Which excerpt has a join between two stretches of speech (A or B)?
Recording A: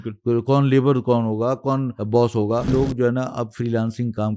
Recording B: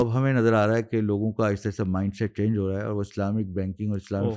A